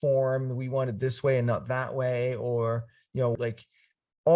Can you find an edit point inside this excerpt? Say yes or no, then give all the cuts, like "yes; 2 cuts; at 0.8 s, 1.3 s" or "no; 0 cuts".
yes; 1 cut; at 3.4 s